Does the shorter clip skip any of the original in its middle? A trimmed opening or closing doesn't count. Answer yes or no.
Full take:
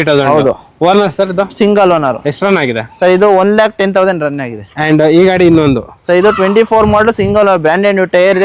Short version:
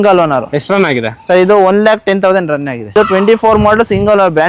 yes